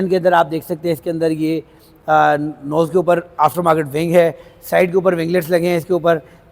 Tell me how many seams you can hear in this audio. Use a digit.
0